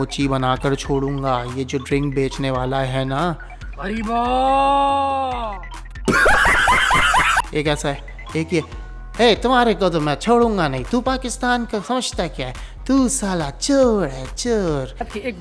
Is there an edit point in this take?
no; 0 cuts

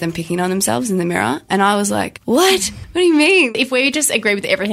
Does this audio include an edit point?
yes; 3 cuts; at 2.1 s, 2.8 s, 3.5 s

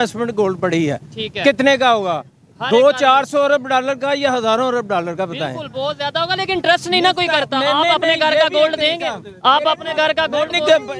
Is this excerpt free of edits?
yes; 0 cuts

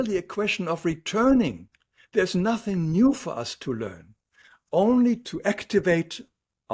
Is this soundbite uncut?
no; 1 cut; at 5.2 s

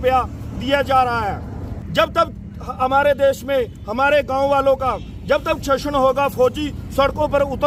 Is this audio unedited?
yes; 0 cuts

